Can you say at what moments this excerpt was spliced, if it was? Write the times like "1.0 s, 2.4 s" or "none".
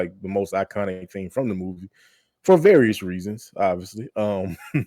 none